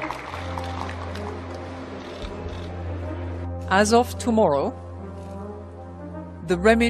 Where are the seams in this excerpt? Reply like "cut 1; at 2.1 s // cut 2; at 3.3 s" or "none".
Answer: cut 1; at 2.7 s